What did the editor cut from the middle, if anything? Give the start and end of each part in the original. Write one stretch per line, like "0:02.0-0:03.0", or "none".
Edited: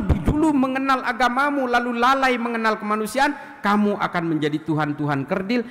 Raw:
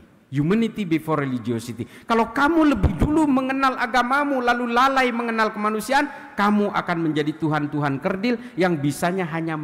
none